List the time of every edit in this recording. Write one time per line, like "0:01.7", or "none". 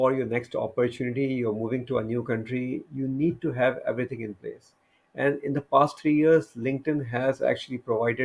none